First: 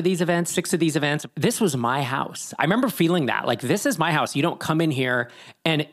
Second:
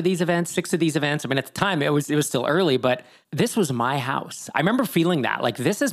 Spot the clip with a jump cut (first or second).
first